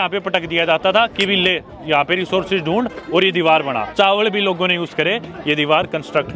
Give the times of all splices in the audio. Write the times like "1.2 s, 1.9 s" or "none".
3.9 s